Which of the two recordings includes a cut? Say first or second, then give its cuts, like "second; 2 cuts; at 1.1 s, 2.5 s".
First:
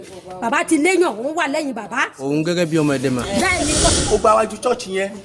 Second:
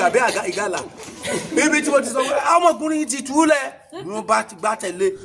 first; 1 cut; at 4.0 s